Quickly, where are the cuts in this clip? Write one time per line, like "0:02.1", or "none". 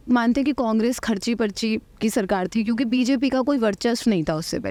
none